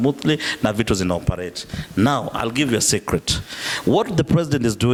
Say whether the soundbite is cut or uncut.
uncut